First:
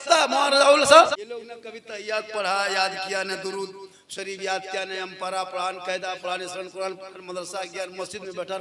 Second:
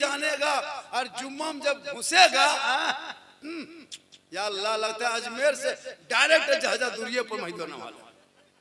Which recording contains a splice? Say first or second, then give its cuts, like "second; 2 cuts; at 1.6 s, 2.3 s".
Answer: first; 1 cut; at 1.1 s